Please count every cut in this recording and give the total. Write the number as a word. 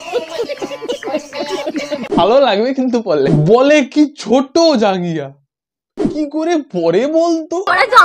zero